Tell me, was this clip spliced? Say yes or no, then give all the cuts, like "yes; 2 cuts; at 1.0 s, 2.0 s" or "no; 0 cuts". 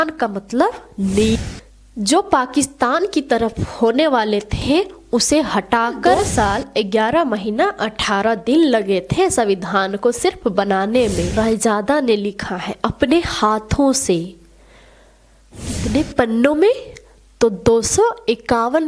yes; 4 cuts; at 1.4 s, 6.2 s, 11.3 s, 15.8 s